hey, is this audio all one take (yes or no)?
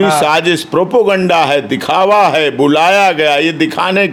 yes